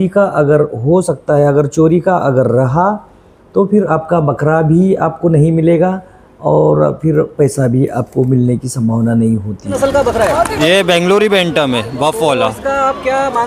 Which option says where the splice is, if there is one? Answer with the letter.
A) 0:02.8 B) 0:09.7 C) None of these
B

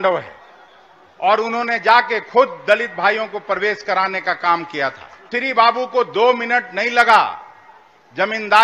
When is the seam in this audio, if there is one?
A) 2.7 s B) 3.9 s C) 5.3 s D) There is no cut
C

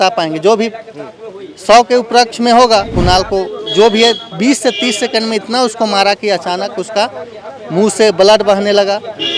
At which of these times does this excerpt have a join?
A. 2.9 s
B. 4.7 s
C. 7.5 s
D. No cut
A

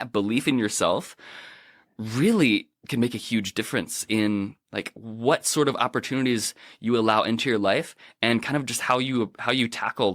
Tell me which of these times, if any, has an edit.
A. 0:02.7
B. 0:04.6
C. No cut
A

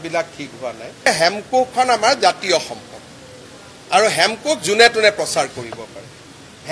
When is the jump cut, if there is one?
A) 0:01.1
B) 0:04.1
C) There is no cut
A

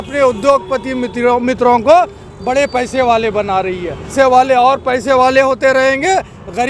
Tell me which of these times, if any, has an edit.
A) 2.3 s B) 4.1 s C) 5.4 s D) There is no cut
B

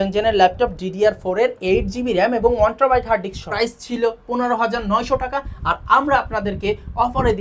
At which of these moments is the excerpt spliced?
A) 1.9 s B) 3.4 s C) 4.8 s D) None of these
B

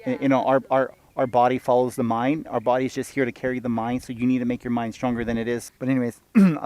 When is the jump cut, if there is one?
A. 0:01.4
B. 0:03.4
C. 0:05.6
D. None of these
C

